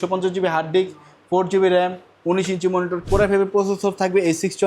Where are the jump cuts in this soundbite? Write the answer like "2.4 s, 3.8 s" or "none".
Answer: 3.0 s